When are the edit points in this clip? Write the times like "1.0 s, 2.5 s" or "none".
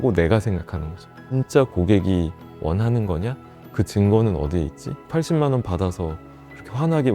1.4 s